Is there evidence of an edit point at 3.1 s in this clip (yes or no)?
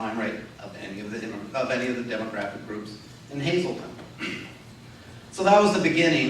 yes